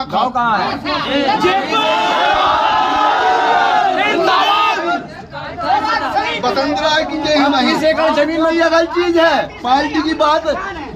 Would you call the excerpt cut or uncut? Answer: cut